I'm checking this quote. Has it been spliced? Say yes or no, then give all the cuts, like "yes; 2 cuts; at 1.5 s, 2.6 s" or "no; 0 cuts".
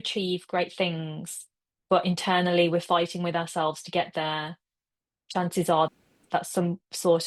no; 0 cuts